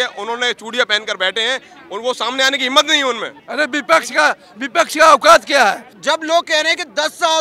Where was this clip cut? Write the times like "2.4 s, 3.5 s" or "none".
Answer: 3.4 s, 5.9 s